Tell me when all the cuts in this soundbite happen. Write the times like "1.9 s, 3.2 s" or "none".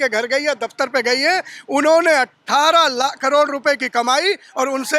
none